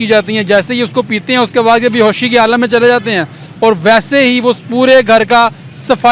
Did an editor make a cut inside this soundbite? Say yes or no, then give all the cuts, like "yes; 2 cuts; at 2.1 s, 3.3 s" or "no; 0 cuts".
no; 0 cuts